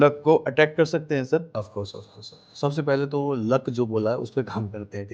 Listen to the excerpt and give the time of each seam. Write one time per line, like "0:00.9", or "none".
0:01.5